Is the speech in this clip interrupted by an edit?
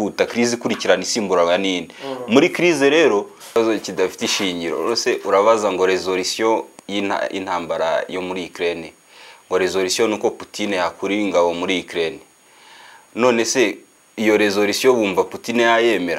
yes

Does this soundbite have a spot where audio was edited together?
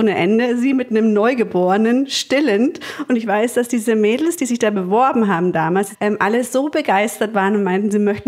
yes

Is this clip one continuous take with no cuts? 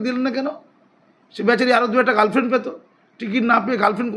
yes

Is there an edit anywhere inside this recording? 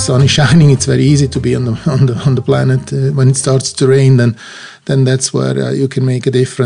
no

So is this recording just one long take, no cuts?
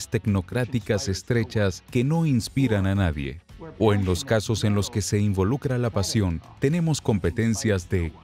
yes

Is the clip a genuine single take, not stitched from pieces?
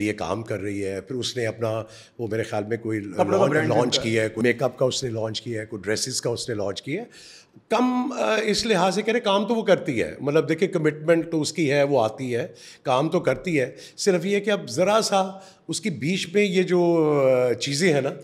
yes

